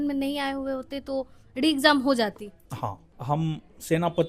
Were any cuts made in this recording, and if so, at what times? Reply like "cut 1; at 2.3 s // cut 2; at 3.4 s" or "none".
cut 1; at 2.8 s